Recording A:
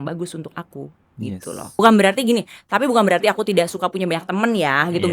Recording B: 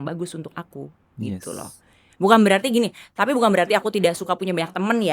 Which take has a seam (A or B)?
A